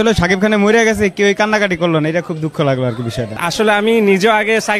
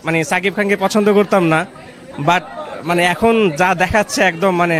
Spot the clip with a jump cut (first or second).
first